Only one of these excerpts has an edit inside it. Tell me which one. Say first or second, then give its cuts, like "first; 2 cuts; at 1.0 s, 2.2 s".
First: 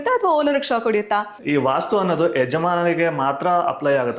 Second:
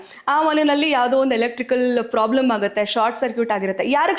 first; 1 cut; at 1.3 s